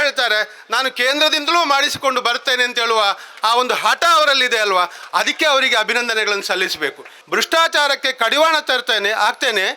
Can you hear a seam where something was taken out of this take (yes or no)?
yes